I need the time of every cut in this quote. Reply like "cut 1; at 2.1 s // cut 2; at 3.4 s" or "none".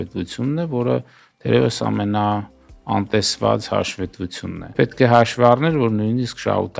cut 1; at 4.7 s